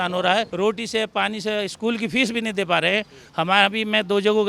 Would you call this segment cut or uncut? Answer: uncut